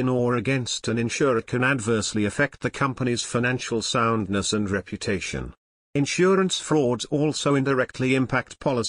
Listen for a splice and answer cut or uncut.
uncut